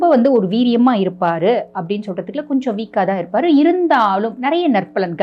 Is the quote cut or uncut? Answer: uncut